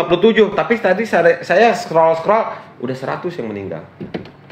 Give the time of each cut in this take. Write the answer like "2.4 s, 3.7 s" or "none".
none